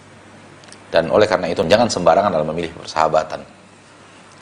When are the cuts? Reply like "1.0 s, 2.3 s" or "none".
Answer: 1.6 s